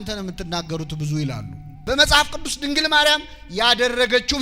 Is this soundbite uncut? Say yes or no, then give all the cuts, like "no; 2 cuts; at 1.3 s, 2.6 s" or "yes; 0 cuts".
no; 1 cut; at 1.8 s